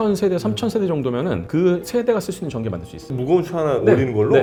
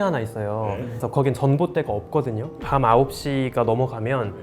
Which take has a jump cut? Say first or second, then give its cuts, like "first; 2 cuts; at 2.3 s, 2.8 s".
second; 1 cut; at 0.9 s